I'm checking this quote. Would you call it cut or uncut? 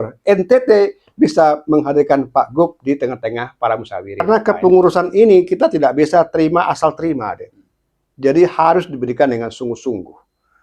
cut